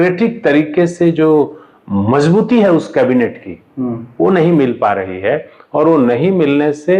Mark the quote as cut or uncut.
uncut